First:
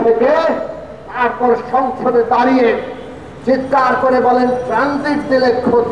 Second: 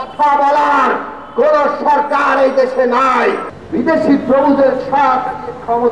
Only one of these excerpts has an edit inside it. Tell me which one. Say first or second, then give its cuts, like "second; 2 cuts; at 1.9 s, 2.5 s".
second; 1 cut; at 3.5 s